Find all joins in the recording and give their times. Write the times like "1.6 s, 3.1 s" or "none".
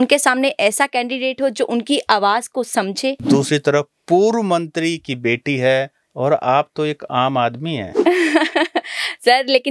3.2 s